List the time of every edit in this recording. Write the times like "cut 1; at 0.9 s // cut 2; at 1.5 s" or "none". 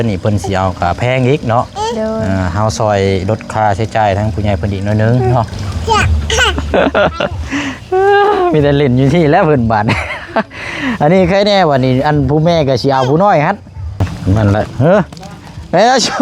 cut 1; at 5.6 s // cut 2; at 14.1 s